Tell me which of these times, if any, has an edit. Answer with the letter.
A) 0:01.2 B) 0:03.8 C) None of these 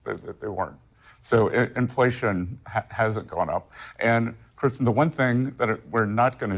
C